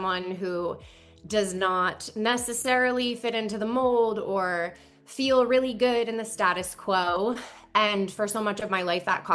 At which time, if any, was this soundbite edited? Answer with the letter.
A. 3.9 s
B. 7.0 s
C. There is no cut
C